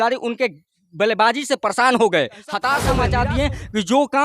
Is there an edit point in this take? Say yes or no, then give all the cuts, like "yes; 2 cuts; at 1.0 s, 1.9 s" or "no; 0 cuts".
yes; 1 cut; at 3.0 s